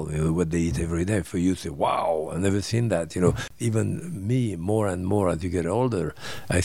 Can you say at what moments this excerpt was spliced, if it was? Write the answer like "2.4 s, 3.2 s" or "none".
3.5 s